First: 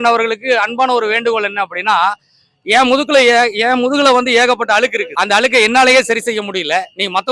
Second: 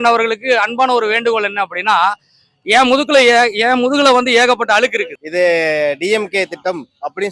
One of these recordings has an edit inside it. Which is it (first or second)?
second